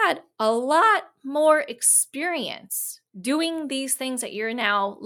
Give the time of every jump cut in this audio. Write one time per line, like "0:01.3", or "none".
none